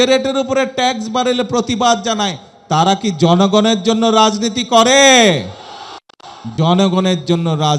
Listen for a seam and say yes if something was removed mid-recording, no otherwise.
no